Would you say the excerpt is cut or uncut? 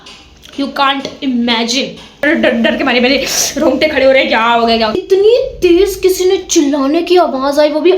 cut